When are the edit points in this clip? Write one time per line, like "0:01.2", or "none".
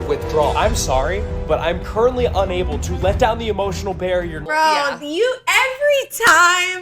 0:04.4